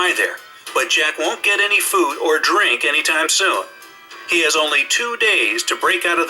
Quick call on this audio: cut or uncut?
cut